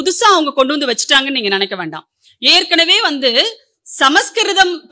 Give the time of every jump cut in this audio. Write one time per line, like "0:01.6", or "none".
none